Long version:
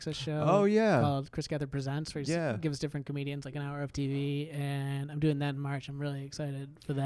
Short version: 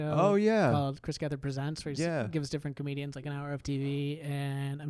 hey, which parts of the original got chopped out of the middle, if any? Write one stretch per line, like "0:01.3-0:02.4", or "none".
none